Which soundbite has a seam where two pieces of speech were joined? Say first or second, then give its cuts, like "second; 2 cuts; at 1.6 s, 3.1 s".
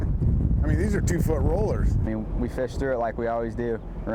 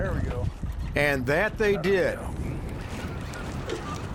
first; 1 cut; at 2.1 s